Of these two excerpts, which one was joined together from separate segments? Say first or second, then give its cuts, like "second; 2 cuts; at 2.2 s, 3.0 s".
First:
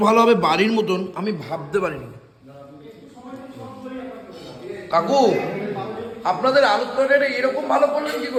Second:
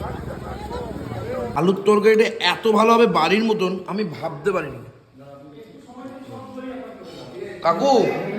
second; 1 cut; at 1.5 s